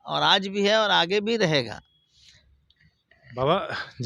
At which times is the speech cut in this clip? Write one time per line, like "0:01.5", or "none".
none